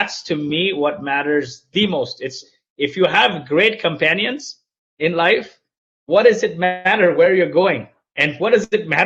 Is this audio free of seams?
yes; 0 cuts

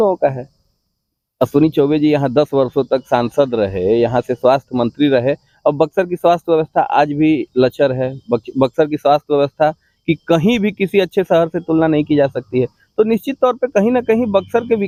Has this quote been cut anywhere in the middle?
no; 0 cuts

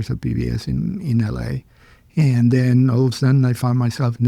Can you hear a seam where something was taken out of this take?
no; 0 cuts

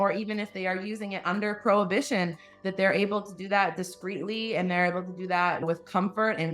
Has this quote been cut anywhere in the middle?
yes; 1 cut; at 5.6 s

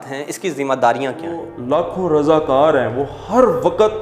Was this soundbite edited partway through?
yes; 1 cut; at 1.5 s

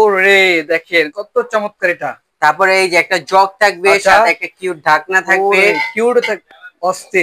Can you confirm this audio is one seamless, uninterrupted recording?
yes; 0 cuts

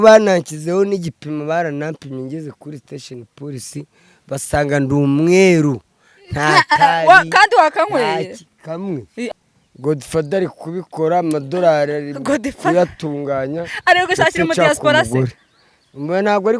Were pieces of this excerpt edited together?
yes; 1 cut; at 9.3 s

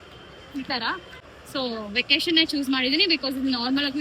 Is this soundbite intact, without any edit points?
no; 1 cut; at 1.2 s

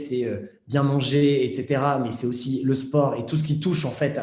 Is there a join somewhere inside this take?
no; 0 cuts

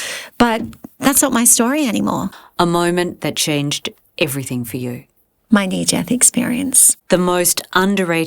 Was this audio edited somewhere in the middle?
yes; 2 cuts; at 2.3 s, 6.9 s

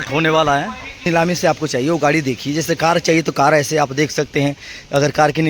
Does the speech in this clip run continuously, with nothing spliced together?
no; 1 cut; at 1.1 s

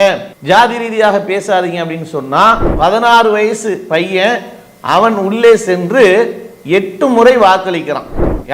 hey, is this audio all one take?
no; 1 cut; at 2.7 s

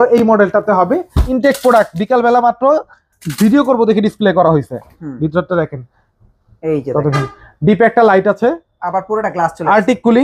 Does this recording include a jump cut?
yes; 1 cut; at 1.2 s

